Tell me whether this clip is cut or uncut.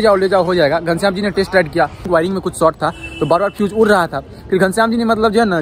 cut